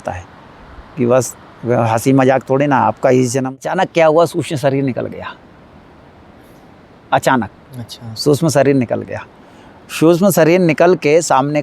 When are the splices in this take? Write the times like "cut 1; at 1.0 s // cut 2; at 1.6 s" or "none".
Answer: cut 1; at 3.5 s